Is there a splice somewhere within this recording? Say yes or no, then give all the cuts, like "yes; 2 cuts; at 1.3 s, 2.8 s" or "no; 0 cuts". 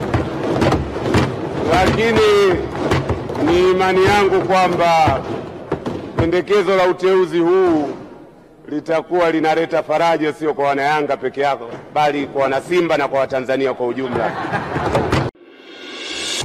yes; 1 cut; at 15.3 s